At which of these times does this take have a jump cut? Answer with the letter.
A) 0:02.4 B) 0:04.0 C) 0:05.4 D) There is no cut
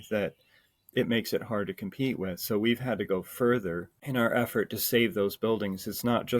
B